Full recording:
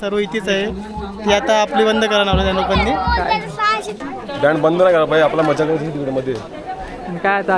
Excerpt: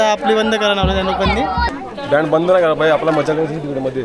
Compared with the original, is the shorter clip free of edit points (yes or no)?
no